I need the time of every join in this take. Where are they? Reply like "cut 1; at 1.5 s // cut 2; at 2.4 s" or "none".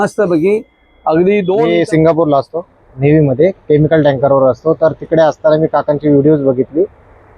cut 1; at 1.7 s